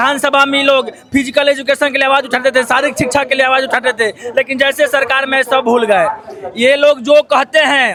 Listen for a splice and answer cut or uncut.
uncut